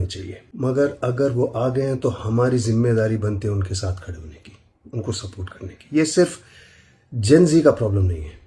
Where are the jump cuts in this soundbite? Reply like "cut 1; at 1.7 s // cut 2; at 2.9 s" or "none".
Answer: none